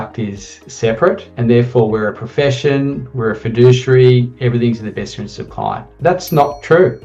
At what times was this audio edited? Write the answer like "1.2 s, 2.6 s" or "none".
none